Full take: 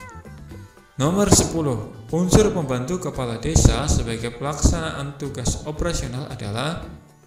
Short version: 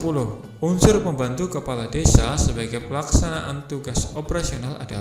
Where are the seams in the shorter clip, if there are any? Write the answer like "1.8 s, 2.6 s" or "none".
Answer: none